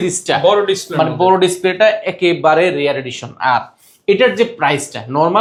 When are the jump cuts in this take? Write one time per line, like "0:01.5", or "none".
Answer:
none